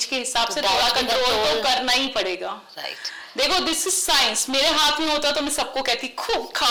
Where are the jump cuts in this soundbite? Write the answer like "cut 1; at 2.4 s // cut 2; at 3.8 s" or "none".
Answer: none